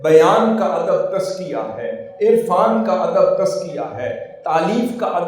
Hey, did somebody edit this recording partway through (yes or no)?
no